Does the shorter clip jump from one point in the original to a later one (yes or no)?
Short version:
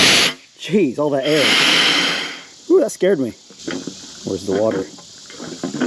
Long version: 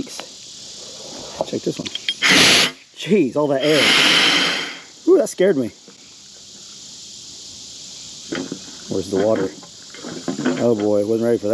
yes